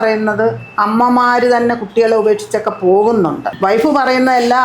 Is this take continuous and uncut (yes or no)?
no